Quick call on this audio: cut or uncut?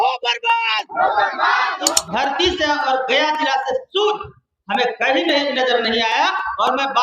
cut